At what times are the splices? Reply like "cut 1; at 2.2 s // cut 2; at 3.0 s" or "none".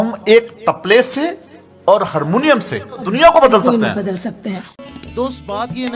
cut 1; at 3.1 s // cut 2; at 5.0 s